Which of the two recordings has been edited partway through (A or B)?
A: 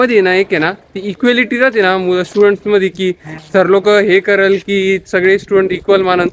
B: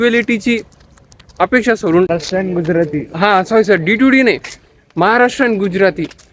B